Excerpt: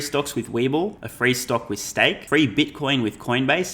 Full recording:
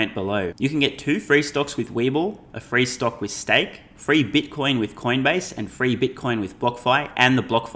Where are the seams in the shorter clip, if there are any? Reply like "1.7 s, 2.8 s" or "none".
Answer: 1.0 s, 2.2 s